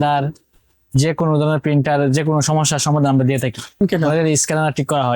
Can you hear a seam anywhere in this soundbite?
yes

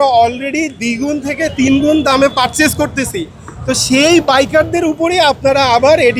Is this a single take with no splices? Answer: yes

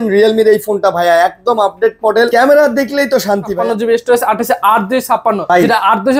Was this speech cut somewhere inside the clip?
yes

